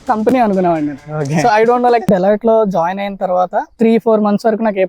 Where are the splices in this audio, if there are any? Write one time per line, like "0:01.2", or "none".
0:02.1